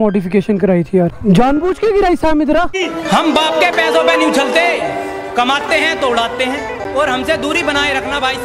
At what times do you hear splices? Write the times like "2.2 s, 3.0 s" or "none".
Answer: 1.2 s, 2.9 s, 6.8 s

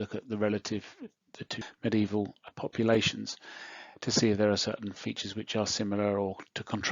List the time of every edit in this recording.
1.6 s, 2.5 s

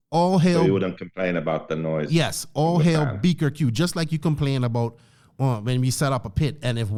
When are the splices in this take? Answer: none

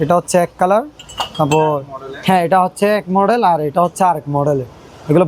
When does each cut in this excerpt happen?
none

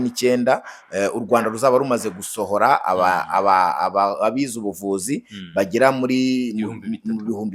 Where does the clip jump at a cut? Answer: none

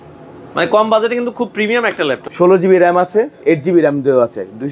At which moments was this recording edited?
2.2 s

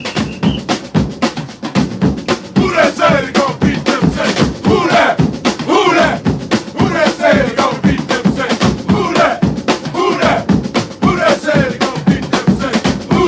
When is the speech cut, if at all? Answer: none

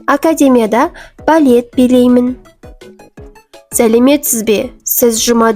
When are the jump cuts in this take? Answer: 3.0 s

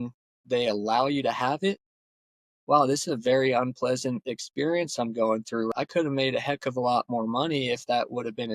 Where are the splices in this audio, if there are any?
2.0 s, 5.7 s

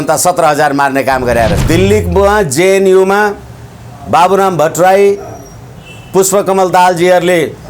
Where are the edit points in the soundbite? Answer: 1.6 s

